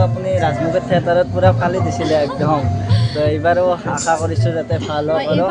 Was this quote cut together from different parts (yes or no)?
no